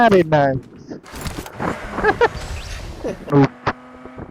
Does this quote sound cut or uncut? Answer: cut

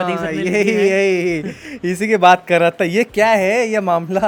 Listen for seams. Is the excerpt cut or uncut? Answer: uncut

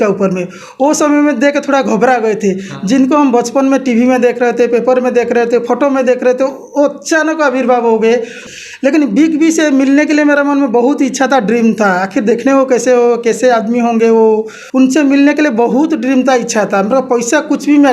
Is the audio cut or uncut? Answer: cut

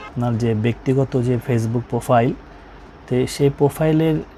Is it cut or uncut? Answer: uncut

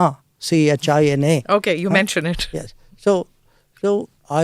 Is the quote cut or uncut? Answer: uncut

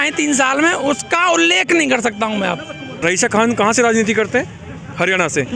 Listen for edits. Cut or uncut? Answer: cut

